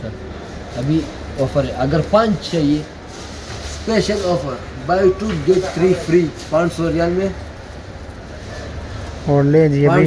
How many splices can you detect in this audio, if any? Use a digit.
0